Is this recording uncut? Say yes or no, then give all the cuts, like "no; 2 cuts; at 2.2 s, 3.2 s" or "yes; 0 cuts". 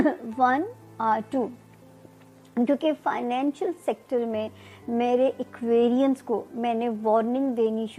yes; 0 cuts